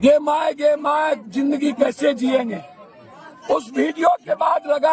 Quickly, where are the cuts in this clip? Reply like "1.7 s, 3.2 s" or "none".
none